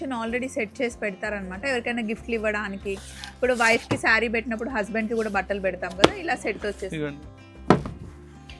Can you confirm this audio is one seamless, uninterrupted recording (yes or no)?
no